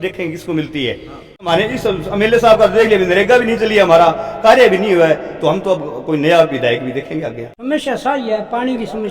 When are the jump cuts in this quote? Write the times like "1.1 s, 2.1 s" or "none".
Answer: 1.5 s, 7.5 s